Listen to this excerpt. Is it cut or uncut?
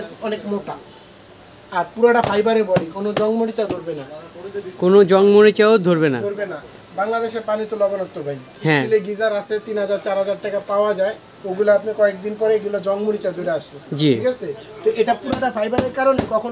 uncut